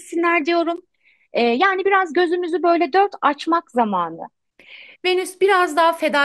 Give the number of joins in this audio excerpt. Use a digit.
0